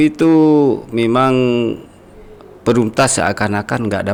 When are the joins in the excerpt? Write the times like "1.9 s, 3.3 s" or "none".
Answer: none